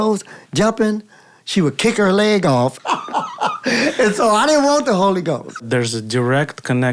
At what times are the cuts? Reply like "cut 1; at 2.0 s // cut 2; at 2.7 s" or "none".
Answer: cut 1; at 2.8 s // cut 2; at 5.6 s